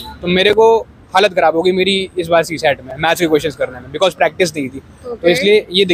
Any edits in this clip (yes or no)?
no